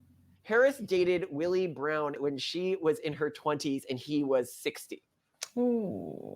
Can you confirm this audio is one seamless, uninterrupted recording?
no; 1 cut; at 2.2 s

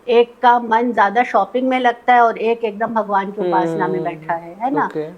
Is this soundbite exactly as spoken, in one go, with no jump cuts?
yes; 0 cuts

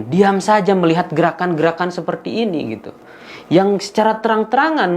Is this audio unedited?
yes; 0 cuts

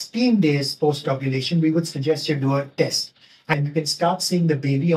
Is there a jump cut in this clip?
yes; 1 cut; at 3.5 s

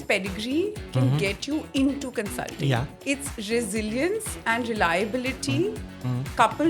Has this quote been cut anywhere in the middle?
yes; 1 cut; at 2.9 s

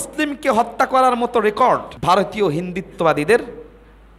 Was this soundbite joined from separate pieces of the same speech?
yes; 1 cut; at 1.9 s

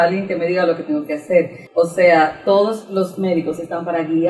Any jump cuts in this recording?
yes; 1 cut; at 1.6 s

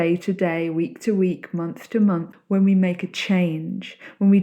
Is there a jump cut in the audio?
yes; 1 cut; at 2.3 s

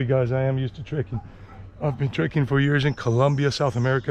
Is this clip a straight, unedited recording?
yes; 0 cuts

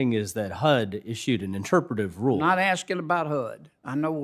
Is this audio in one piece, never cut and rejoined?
yes; 0 cuts

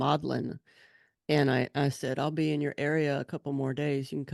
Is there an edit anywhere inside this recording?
no; 0 cuts

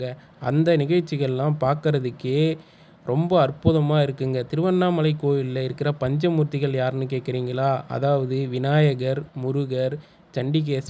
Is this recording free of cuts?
yes; 0 cuts

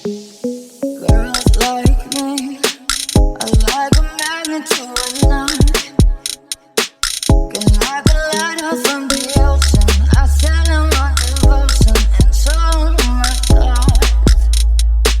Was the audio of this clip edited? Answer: yes; 1 cut; at 1.0 s

